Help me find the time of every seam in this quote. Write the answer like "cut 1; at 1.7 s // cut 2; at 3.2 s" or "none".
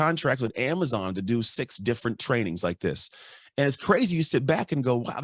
none